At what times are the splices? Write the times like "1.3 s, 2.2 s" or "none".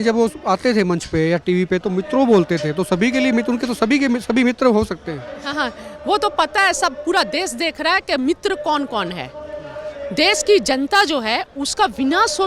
none